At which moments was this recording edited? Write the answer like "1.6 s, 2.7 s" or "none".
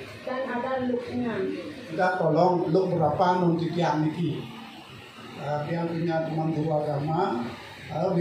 1.8 s